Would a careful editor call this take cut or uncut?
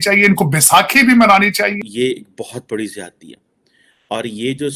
cut